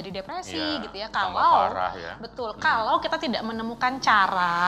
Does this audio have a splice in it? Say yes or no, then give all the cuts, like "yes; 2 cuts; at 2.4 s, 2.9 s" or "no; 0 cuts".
no; 0 cuts